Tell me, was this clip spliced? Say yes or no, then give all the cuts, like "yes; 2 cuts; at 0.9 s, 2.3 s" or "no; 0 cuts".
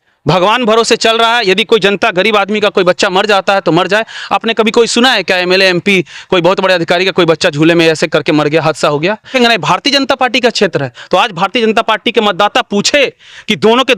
yes; 1 cut; at 9.3 s